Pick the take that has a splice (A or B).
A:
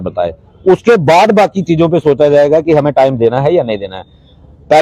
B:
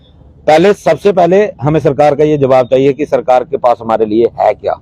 A